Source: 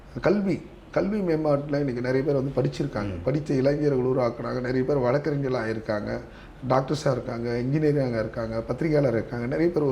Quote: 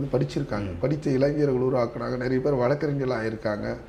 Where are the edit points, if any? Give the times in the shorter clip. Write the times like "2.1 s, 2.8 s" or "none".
none